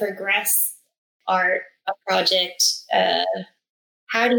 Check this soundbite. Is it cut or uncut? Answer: cut